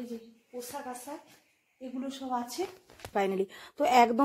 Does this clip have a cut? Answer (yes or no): yes